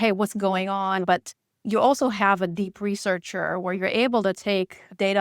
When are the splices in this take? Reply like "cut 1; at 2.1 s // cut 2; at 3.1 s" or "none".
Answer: cut 1; at 1.0 s